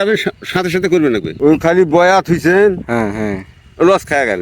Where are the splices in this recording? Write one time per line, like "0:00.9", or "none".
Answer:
0:01.4